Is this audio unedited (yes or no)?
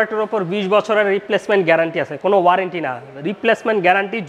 yes